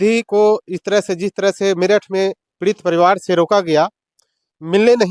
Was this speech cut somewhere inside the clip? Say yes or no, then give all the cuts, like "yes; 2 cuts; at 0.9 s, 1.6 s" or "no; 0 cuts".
no; 0 cuts